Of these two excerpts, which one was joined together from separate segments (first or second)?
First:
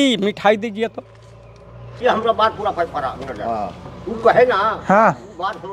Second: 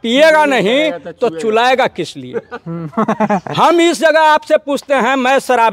first